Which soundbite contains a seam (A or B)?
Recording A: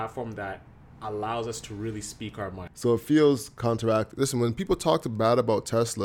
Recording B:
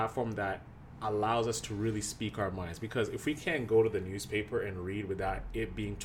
A